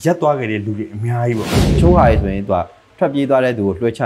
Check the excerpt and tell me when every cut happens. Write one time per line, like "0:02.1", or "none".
0:01.6